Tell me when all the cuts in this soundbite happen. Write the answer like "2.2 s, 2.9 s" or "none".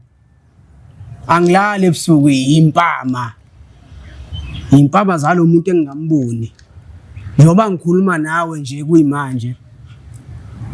none